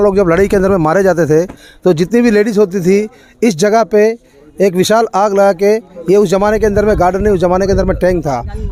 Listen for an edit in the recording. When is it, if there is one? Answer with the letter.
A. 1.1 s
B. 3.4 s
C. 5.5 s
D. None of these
D